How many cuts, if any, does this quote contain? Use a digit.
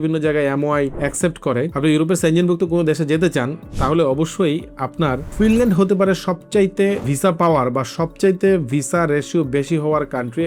3